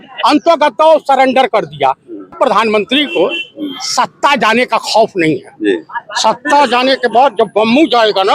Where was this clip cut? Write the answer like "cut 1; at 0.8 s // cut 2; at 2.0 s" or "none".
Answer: cut 1; at 2.3 s